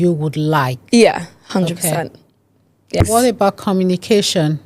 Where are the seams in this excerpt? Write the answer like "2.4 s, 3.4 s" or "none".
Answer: 3.0 s

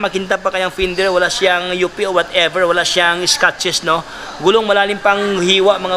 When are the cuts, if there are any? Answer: none

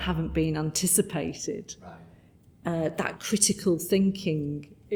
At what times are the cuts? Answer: none

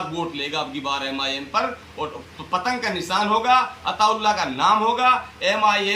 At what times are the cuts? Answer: none

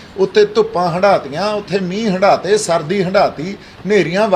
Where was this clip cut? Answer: none

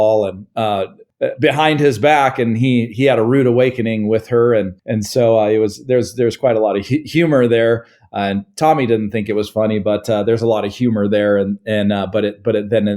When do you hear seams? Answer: 1.0 s

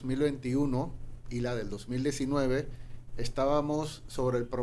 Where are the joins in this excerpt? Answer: none

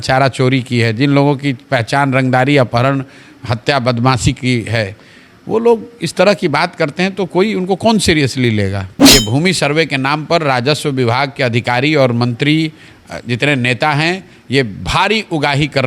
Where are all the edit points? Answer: 8.9 s

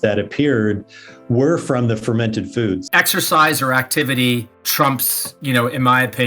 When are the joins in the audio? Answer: 2.8 s, 4.6 s

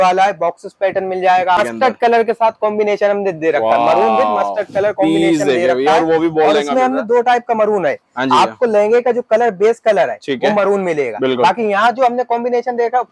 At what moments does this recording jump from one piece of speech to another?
1.6 s

